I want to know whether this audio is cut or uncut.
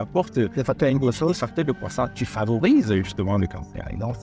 uncut